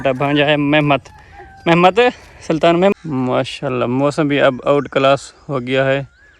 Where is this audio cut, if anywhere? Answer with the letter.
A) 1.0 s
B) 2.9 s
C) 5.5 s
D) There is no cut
B